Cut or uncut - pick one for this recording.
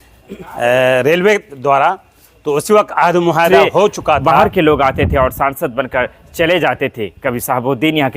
cut